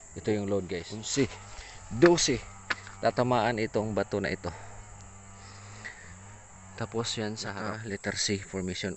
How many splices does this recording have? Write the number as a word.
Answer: two